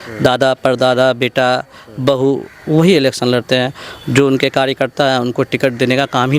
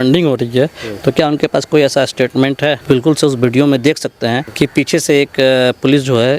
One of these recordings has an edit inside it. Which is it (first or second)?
second